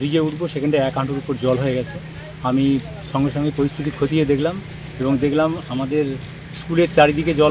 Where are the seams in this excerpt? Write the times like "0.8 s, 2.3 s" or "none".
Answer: none